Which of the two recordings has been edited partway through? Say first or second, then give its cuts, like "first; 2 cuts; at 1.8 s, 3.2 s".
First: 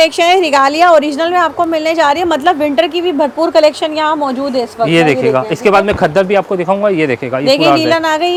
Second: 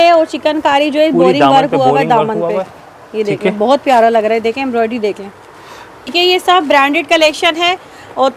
second; 1 cut; at 6.1 s